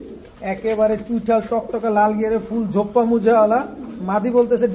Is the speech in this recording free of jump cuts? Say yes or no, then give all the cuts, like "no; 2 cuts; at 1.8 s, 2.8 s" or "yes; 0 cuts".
yes; 0 cuts